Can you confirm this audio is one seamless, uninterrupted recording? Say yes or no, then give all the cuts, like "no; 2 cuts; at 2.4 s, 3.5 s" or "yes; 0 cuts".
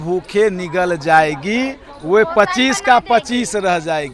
yes; 0 cuts